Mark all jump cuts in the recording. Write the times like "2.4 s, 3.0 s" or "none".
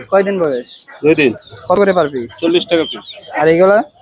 1.8 s